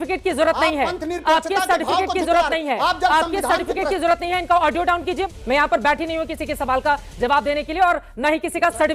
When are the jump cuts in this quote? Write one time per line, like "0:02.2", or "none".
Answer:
0:05.3